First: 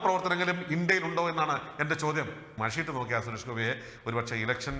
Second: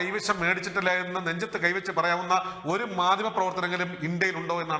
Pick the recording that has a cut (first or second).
first